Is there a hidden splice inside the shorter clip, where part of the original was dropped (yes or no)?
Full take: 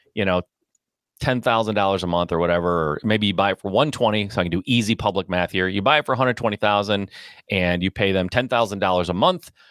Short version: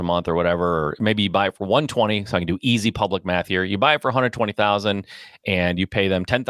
no